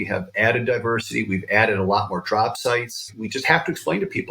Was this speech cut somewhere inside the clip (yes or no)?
yes